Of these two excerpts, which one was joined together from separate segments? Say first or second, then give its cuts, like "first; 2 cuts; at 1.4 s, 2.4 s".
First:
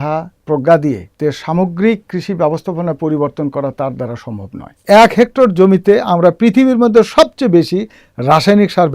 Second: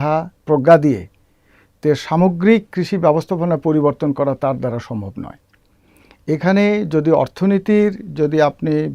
first; 2 cuts; at 1.1 s, 4.8 s